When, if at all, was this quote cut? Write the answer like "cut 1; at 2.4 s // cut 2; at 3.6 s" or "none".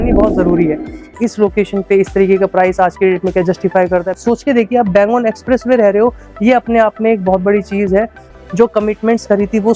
cut 1; at 1.2 s // cut 2; at 4.1 s // cut 3; at 8.2 s